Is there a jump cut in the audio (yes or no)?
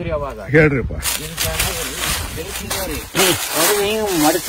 no